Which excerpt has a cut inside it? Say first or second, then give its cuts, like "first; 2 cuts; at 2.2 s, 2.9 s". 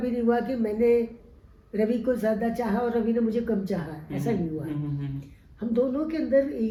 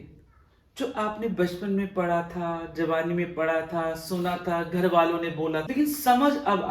second; 1 cut; at 5.7 s